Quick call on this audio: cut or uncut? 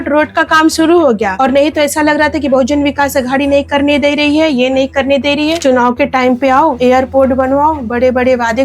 cut